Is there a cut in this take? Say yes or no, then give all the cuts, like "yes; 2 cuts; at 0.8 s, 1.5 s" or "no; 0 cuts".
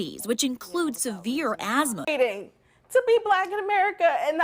yes; 1 cut; at 2.1 s